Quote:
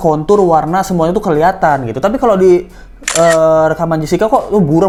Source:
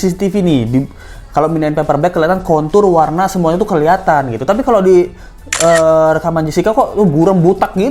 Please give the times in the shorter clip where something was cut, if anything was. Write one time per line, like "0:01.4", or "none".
none

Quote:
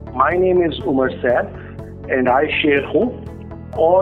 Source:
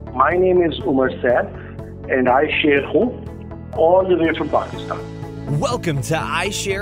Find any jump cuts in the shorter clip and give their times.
none

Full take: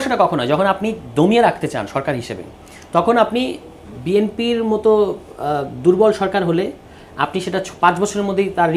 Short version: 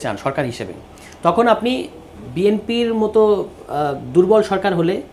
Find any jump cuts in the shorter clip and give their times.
none

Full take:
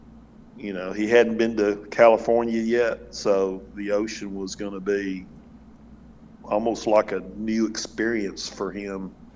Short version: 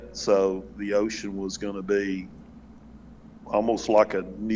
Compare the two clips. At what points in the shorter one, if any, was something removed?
none

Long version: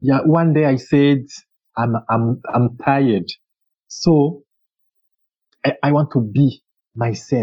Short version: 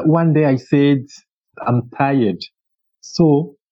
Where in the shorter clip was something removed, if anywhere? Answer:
0:01.5

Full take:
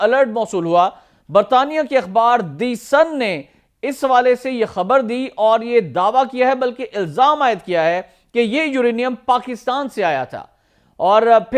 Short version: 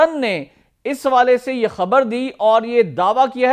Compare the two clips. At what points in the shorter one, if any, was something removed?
none

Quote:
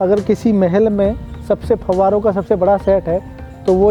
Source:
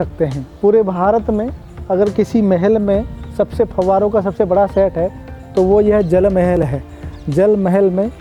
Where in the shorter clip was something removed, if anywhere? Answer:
none

